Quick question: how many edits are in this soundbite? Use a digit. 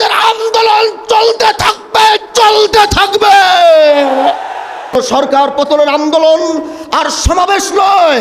1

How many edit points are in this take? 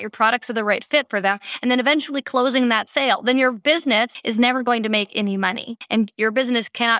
2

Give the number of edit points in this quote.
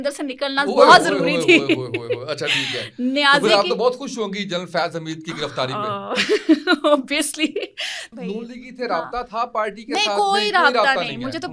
1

